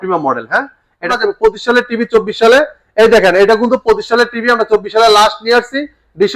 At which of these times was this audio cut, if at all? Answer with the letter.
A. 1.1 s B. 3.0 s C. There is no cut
A